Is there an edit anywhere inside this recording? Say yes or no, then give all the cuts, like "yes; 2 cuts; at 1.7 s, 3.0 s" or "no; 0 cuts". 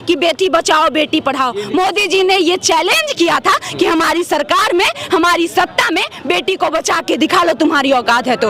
no; 0 cuts